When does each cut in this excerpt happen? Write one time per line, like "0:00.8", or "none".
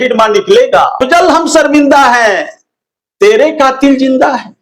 0:01.0